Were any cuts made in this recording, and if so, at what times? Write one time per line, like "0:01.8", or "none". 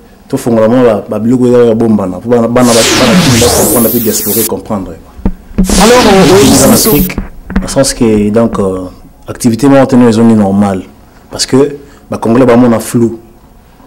0:06.5